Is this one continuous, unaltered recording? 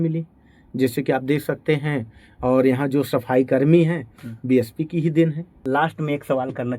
no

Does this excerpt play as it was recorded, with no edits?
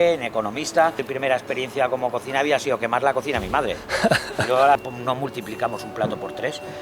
no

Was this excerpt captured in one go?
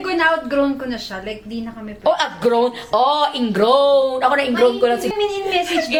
yes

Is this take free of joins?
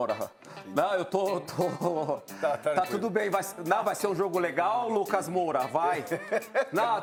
yes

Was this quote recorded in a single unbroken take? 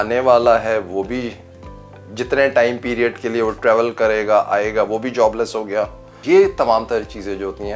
no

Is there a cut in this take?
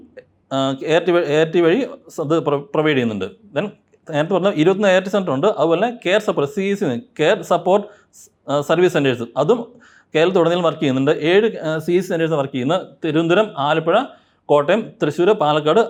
no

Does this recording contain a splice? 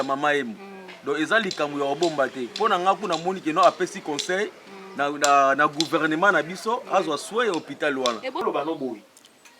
yes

